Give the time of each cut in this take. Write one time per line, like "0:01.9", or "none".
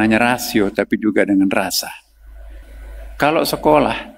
0:02.7